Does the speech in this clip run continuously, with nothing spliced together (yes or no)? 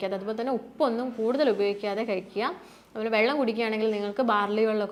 yes